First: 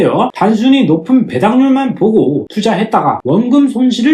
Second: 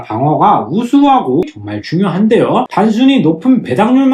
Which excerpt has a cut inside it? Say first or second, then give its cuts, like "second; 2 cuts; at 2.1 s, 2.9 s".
second; 1 cut; at 1.4 s